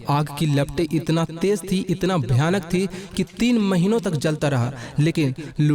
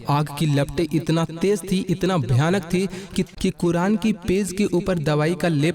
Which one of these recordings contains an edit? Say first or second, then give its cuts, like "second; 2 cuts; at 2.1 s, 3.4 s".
second; 1 cut; at 3.2 s